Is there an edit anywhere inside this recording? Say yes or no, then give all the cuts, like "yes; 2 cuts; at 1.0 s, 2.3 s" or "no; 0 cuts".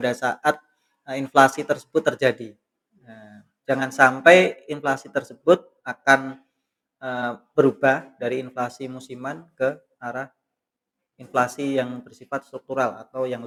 no; 0 cuts